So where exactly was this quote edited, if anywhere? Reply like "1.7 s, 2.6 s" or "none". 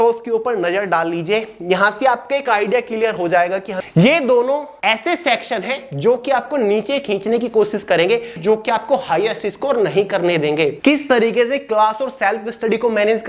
3.7 s, 4.7 s, 8.4 s, 10.8 s